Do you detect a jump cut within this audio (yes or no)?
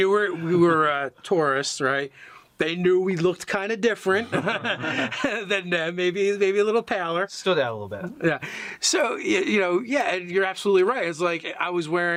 no